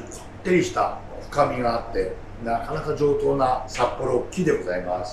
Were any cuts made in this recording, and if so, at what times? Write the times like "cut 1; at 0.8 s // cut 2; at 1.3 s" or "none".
cut 1; at 2.3 s // cut 2; at 3.7 s